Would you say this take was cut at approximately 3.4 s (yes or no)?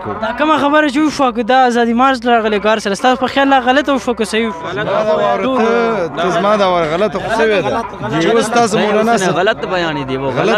no